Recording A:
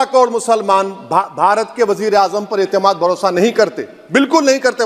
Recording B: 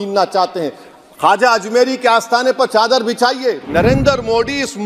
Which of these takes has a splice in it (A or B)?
B